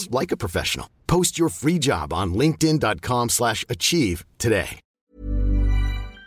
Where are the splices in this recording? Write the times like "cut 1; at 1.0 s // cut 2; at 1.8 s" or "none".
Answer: cut 1; at 4.9 s